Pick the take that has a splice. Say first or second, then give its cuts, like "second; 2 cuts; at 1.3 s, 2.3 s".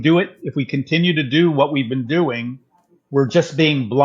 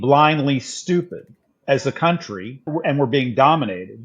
second; 2 cuts; at 1.6 s, 2.7 s